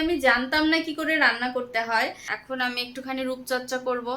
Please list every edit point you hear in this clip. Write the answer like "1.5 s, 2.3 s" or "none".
2.3 s